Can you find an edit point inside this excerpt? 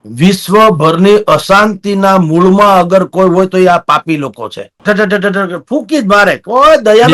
yes; 1 cut; at 4.8 s

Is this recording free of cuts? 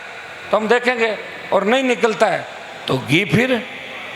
yes; 0 cuts

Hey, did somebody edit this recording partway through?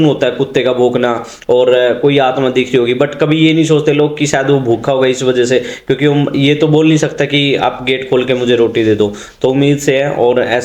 no; 0 cuts

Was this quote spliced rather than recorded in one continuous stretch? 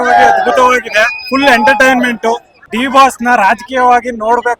yes; 1 cut; at 2.5 s

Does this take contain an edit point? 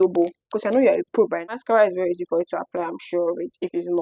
yes; 1 cut; at 1.5 s

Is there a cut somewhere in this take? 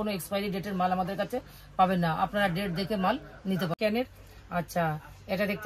yes; 1 cut; at 3.7 s

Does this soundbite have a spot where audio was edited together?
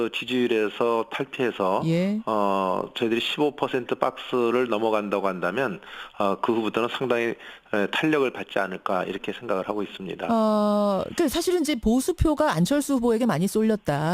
yes; 1 cut; at 4.6 s

